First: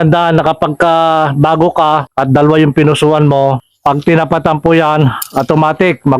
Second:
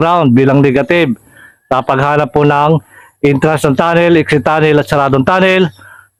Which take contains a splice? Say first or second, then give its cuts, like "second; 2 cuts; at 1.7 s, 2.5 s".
first; 2 cuts; at 2.1 s, 3.7 s